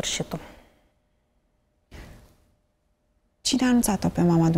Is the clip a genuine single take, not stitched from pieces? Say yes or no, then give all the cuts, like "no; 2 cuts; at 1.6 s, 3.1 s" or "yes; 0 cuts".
yes; 0 cuts